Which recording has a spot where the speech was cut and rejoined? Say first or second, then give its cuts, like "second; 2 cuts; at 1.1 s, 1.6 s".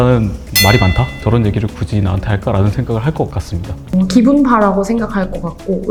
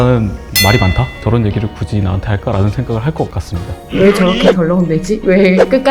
second; 1 cut; at 3.9 s